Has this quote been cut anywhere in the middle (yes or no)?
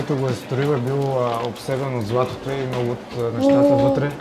no